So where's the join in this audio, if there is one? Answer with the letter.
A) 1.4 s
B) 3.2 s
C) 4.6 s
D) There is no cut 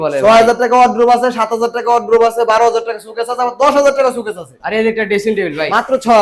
C